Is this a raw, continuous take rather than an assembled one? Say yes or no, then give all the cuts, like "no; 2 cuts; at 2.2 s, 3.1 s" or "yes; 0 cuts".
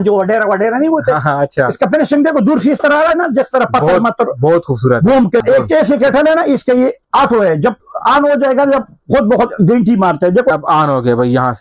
no; 2 cuts; at 5.4 s, 10.5 s